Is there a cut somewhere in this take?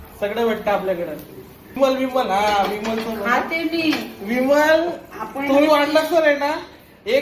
yes; 1 cut; at 1.8 s

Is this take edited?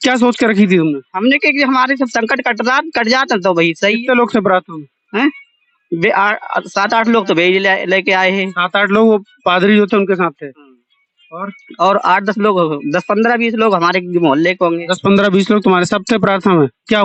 no; 0 cuts

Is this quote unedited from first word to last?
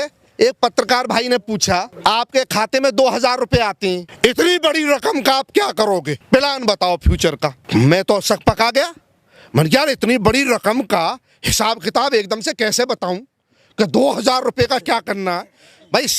no; 4 cuts; at 1.9 s, 4.1 s, 6.2 s, 7.6 s

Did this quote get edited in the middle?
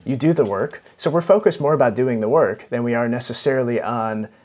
no; 0 cuts

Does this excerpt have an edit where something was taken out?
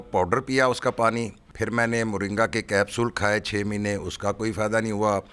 yes; 1 cut; at 1.4 s

